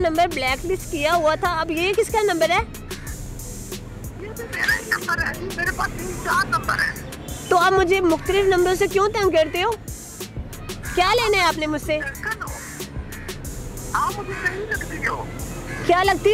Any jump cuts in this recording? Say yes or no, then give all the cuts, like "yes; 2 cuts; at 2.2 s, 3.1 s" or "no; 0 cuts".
no; 0 cuts